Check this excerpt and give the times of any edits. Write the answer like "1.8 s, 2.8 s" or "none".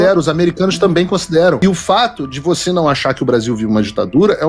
1.6 s